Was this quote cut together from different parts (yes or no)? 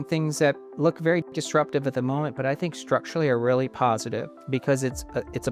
yes